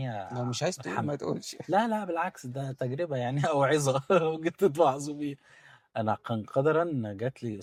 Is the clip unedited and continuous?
yes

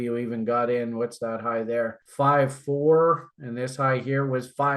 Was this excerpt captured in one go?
no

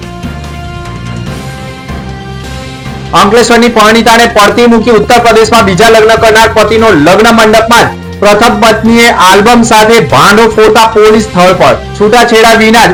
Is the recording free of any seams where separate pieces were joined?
yes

